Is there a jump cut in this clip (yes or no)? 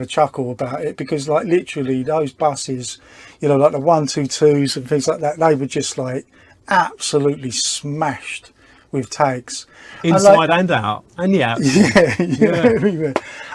no